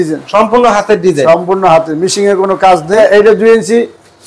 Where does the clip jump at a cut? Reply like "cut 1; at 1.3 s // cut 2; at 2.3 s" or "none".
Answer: cut 1; at 2.9 s